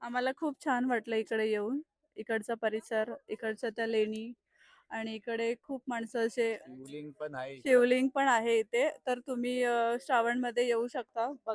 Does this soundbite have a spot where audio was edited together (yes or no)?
no